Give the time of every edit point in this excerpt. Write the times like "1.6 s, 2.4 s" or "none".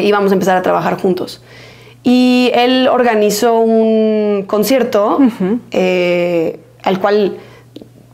none